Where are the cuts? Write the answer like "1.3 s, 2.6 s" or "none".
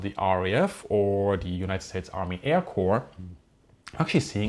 none